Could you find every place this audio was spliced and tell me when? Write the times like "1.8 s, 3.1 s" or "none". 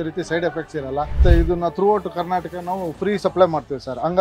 1.2 s